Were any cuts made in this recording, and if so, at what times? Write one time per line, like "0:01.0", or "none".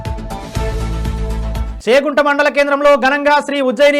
0:01.7